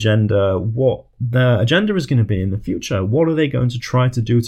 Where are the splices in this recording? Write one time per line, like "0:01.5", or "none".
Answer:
0:01.2